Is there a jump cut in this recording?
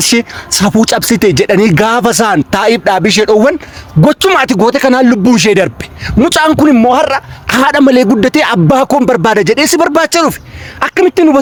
no; 0 cuts

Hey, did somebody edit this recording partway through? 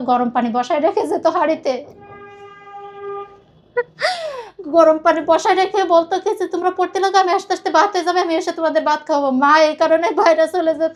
no; 0 cuts

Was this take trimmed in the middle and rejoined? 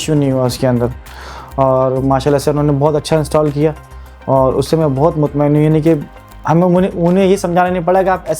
no; 0 cuts

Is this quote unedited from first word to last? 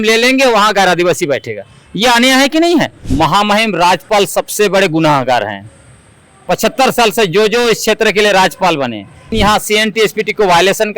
no; 2 cuts; at 3.0 s, 9.3 s

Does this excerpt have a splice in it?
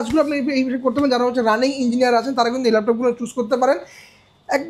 no; 0 cuts

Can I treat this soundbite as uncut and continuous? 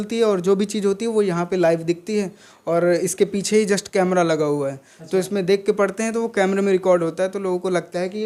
yes; 0 cuts

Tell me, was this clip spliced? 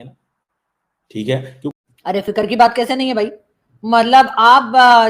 yes; 1 cut; at 1.7 s

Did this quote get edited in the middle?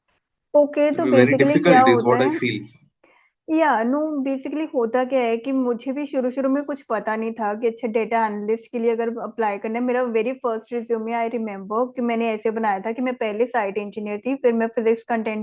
no; 0 cuts

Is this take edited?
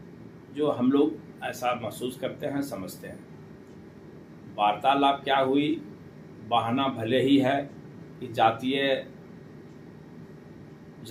no; 0 cuts

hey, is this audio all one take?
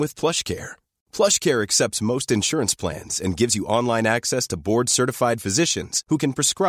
yes; 0 cuts

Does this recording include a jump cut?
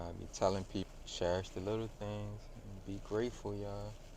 yes; 1 cut; at 1.0 s

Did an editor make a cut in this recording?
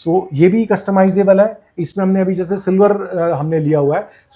no; 0 cuts

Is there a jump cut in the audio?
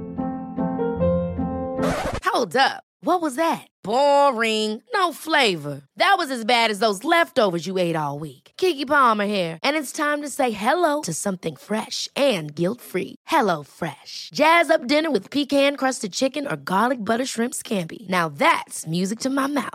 no; 0 cuts

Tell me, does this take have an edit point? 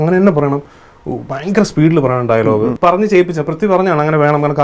yes; 1 cut; at 2.7 s

